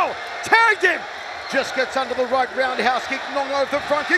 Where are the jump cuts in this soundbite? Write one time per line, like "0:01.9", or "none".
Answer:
0:01.4